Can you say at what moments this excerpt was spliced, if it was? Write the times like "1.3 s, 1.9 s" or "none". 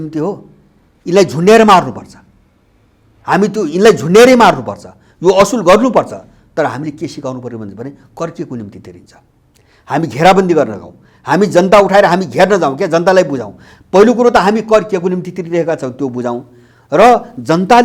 none